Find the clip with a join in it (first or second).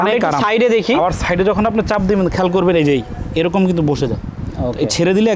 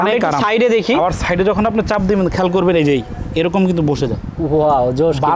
first